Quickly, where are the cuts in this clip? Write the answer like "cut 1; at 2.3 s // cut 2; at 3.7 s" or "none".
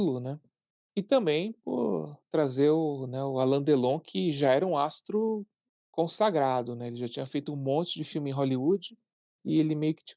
none